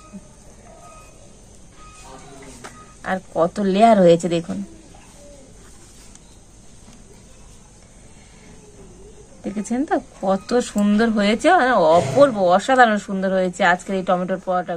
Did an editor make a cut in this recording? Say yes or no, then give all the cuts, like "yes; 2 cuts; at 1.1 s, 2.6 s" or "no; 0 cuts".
no; 0 cuts